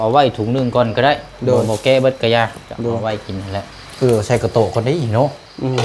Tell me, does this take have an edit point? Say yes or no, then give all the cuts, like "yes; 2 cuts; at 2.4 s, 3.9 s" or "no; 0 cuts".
yes; 1 cut; at 3.8 s